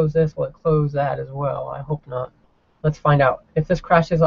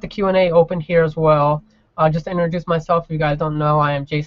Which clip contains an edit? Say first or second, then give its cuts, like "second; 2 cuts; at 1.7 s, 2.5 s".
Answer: second; 1 cut; at 2.3 s